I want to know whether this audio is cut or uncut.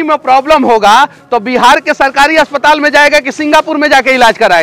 uncut